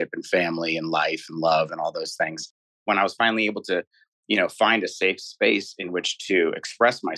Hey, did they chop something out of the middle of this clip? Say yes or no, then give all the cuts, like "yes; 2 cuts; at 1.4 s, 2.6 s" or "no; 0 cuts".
yes; 1 cut; at 2.8 s